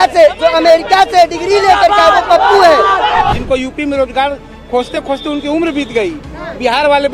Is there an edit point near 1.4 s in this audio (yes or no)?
no